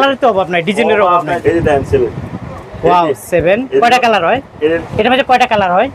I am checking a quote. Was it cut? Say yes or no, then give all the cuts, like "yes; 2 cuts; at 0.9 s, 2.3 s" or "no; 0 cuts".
yes; 2 cuts; at 1.4 s, 4.8 s